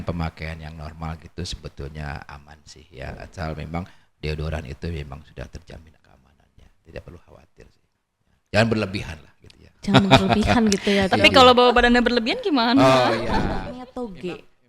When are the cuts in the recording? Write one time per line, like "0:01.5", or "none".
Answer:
0:13.4